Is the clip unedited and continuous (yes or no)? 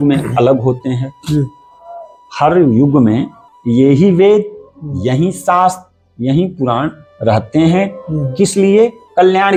yes